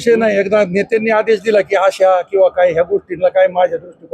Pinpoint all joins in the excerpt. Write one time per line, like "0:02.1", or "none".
none